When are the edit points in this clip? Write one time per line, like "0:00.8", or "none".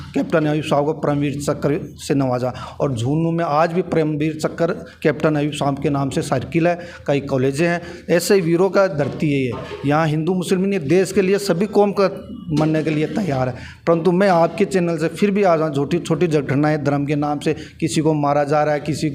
none